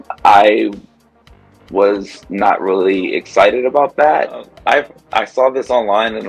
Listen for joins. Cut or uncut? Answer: cut